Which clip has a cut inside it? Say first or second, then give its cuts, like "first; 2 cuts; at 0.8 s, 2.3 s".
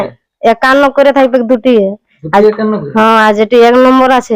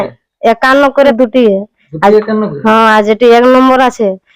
second; 1 cut; at 1.1 s